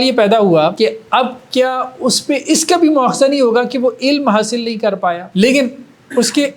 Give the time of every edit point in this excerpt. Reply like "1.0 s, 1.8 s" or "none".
0.9 s, 5.2 s